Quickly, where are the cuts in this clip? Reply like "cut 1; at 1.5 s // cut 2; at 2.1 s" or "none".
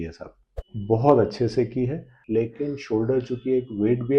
cut 1; at 2.1 s